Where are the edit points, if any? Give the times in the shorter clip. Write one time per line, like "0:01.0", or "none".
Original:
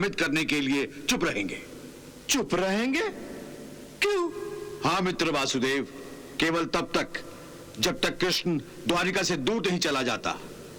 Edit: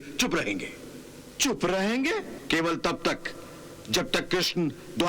0:02.3